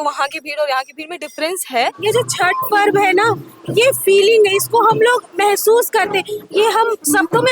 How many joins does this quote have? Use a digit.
1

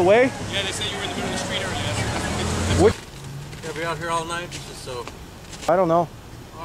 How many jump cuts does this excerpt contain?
1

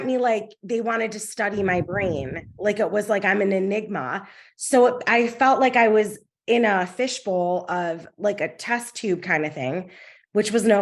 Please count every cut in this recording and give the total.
0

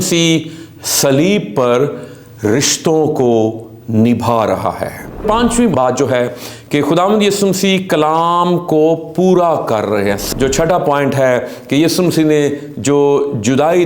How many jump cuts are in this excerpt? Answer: 2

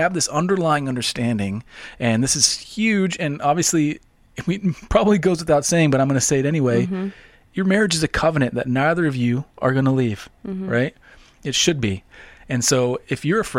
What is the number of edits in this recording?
0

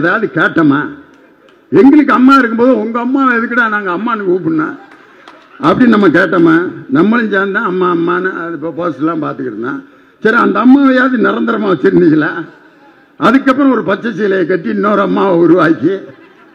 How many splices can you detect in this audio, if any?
0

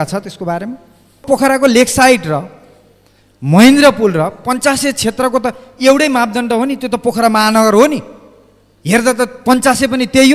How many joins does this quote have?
1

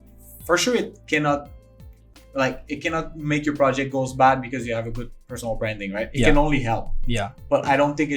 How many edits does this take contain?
0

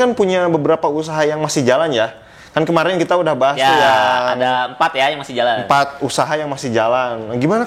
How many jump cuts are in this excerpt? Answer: 0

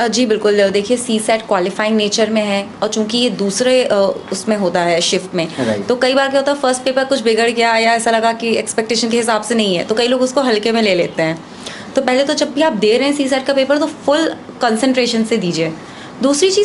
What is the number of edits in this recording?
0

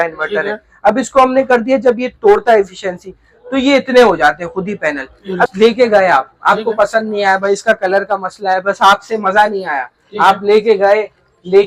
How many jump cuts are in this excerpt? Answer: 1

